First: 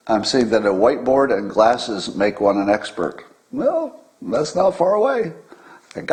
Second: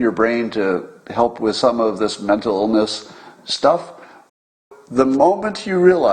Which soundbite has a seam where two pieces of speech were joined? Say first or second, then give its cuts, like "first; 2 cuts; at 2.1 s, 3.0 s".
second; 1 cut; at 4.5 s